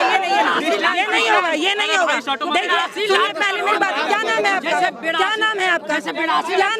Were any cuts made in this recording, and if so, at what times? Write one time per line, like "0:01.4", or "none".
none